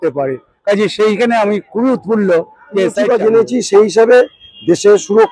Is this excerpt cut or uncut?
cut